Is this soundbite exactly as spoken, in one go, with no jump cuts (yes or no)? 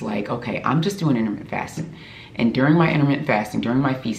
yes